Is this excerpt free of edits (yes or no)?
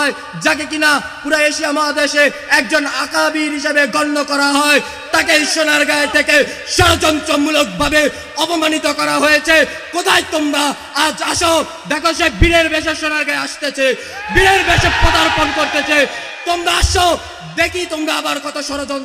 yes